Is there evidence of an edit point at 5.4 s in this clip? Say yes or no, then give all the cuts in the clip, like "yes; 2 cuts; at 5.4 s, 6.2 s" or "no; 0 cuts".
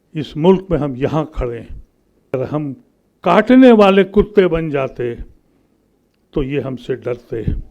no; 1 cut; at 2.3 s